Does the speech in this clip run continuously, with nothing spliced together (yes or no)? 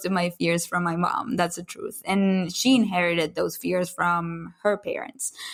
yes